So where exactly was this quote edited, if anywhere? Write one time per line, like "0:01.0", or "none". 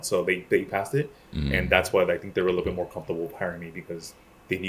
none

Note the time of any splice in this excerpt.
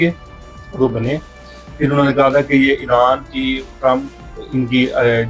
none

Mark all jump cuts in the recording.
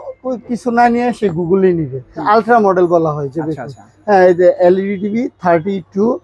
0:02.3

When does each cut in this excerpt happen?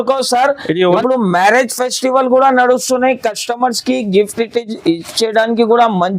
0:01.0

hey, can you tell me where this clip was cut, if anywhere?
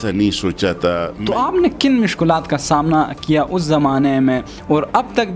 0:01.1

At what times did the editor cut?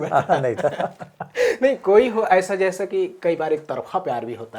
none

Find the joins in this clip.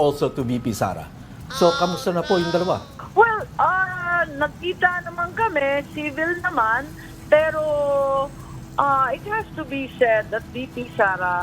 0:02.9

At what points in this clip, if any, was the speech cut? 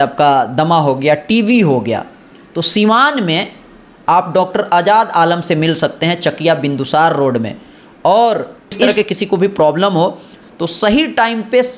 0:08.8

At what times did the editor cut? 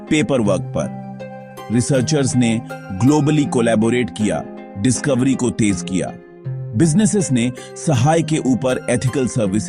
none

